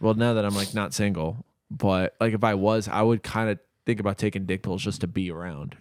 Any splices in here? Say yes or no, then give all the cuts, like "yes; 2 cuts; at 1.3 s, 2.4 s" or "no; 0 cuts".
no; 0 cuts